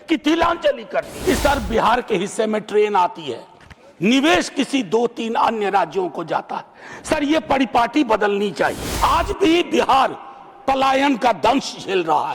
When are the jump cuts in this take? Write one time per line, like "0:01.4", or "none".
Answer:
0:01.1
0:08.9